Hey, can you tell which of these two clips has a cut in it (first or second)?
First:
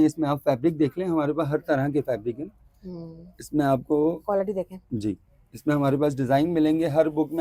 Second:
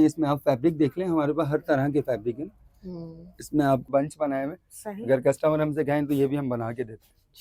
second